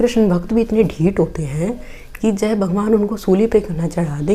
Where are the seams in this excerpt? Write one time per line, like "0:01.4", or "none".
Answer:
none